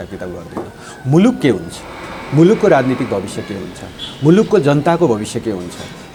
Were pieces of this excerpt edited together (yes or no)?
no